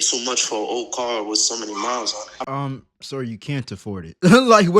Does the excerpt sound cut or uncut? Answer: cut